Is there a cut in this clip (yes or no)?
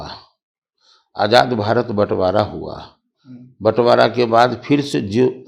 no